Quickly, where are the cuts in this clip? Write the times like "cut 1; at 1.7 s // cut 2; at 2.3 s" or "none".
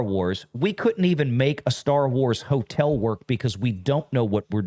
none